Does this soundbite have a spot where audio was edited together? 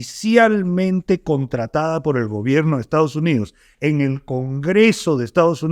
no; 0 cuts

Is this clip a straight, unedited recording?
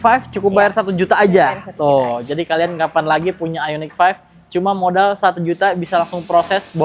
yes; 0 cuts

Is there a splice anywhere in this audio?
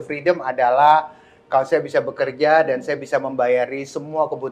no; 0 cuts

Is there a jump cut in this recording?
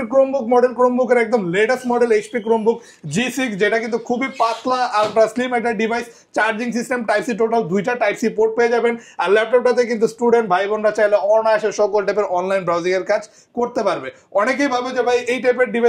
no; 0 cuts

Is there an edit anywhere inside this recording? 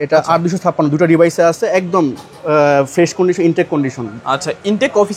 no; 0 cuts

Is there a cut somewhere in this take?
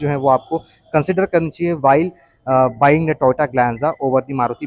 no; 0 cuts

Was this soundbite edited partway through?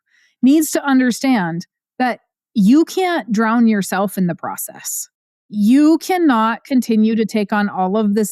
no; 0 cuts

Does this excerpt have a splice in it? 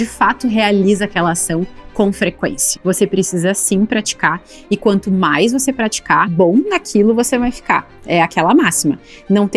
yes; 2 cuts; at 2.7 s, 5.9 s

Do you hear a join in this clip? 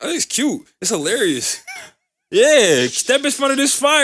no; 0 cuts

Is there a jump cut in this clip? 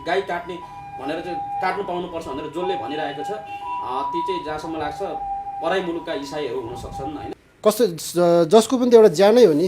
yes; 1 cut; at 7.3 s

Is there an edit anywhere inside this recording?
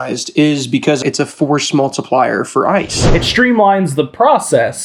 yes; 2 cuts; at 1.0 s, 3.2 s

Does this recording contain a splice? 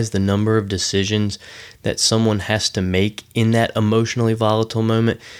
no; 0 cuts

